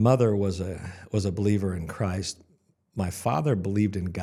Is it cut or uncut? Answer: uncut